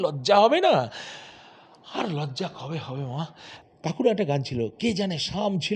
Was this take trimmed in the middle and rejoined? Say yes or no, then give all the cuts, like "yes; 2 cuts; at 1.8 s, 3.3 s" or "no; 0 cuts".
no; 0 cuts